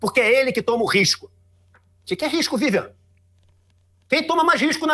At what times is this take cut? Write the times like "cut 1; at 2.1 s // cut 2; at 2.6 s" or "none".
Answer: cut 1; at 1.6 s

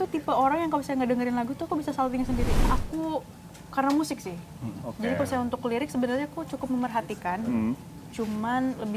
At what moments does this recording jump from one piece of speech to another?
cut 1; at 2.7 s

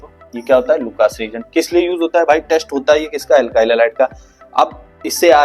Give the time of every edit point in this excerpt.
none

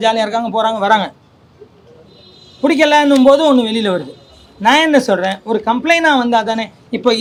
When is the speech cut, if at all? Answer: none

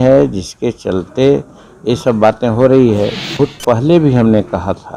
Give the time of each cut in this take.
cut 1; at 3.3 s

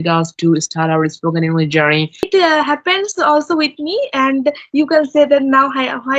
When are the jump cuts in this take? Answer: cut 1; at 2.3 s

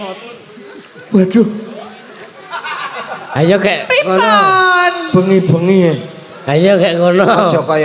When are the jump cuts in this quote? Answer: none

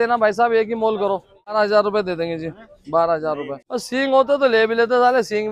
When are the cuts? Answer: cut 1; at 1.5 s // cut 2; at 3.6 s

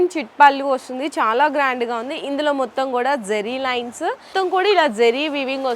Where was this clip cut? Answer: cut 1; at 4.3 s

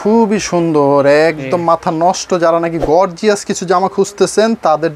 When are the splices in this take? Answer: none

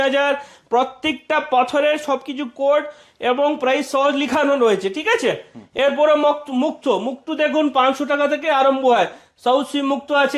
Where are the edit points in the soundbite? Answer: none

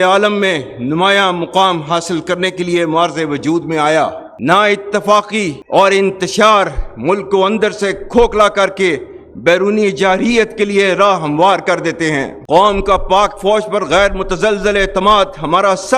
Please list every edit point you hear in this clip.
cut 1; at 4.3 s

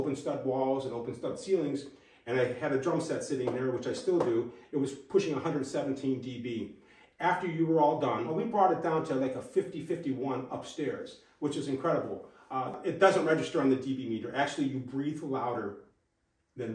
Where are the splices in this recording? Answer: cut 1; at 8.3 s // cut 2; at 12.8 s

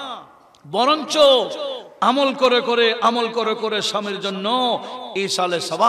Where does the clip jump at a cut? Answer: none

